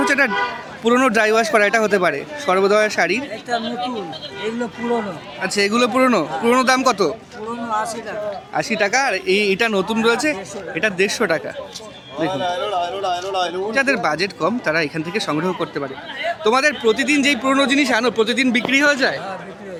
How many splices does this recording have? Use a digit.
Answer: 0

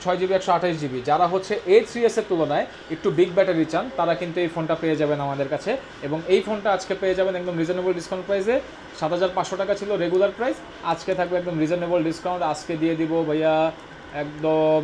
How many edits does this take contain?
0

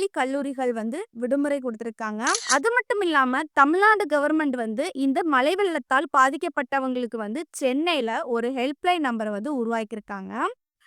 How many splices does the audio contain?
1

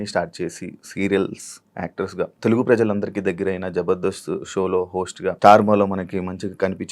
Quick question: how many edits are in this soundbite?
2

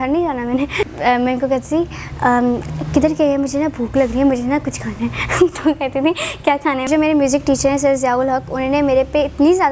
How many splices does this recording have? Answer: 2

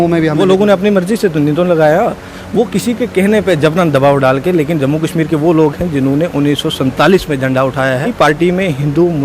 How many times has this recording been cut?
1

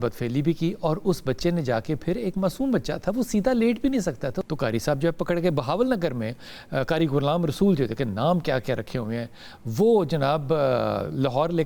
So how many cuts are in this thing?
1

